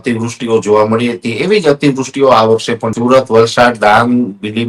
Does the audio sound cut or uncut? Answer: cut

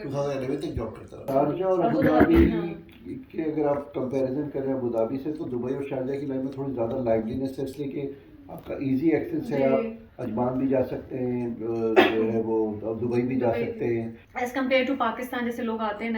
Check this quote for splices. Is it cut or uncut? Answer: cut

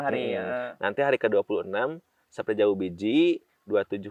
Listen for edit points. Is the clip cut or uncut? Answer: uncut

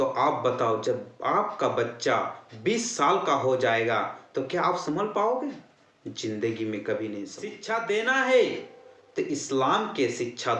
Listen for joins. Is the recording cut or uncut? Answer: cut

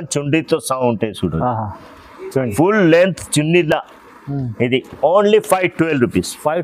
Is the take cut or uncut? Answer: uncut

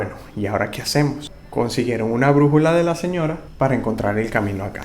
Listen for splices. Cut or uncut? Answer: cut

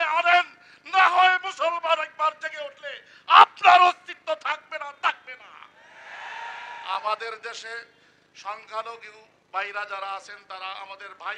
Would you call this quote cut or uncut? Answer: uncut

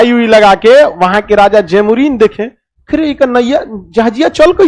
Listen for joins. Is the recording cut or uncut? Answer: uncut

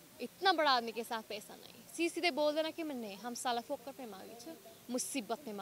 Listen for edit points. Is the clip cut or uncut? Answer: uncut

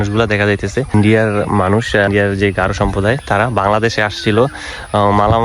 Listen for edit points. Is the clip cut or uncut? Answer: cut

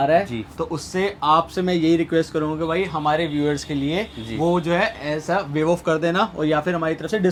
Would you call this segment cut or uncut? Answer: uncut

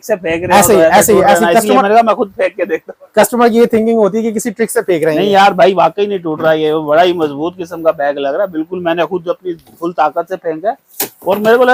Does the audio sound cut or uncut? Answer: uncut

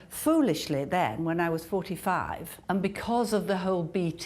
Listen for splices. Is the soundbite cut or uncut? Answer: cut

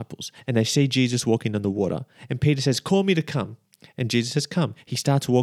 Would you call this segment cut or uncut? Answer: uncut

